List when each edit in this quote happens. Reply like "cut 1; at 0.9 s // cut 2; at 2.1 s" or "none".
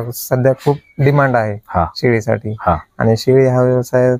none